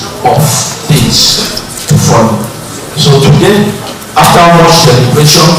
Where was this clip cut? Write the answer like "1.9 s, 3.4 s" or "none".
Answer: 3.5 s